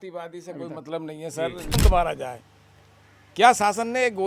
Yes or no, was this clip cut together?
yes